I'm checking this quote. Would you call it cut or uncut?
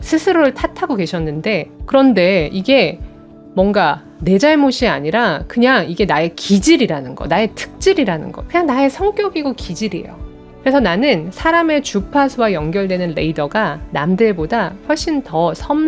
uncut